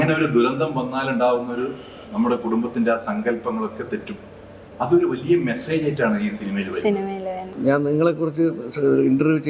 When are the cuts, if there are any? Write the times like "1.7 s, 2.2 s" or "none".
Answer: 7.5 s